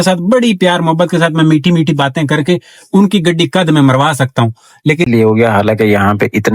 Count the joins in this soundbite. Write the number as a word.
one